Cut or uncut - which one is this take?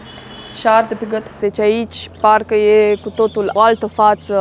cut